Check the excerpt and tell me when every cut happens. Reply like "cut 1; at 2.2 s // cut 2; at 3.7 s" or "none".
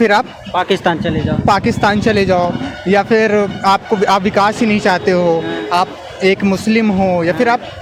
none